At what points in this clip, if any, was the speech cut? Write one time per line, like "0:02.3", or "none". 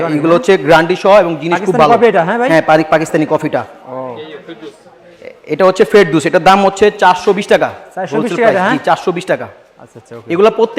none

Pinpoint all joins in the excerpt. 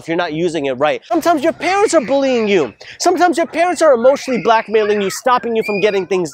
0:01.0

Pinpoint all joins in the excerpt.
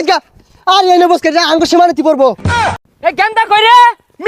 0:02.7

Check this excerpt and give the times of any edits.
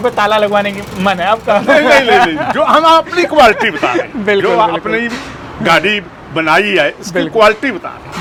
none

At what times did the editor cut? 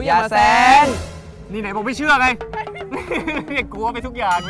none

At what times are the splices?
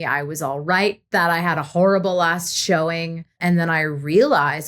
0:03.3

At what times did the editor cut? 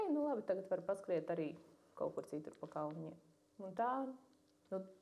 none

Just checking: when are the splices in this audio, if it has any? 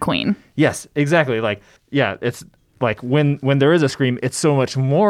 0:01.7

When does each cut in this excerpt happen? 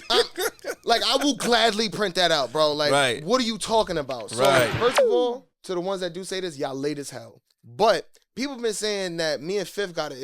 0:04.7

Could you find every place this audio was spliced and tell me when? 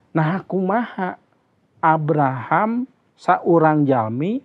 none

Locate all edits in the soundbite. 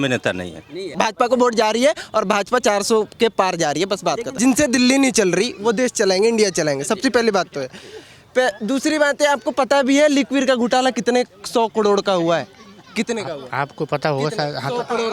0:00.9
0:04.4

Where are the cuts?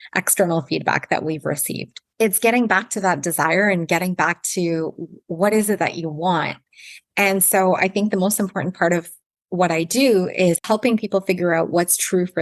0:10.6

